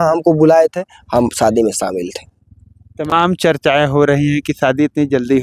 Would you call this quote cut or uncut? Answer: uncut